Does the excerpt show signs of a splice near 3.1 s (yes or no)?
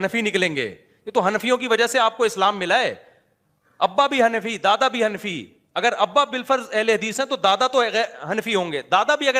no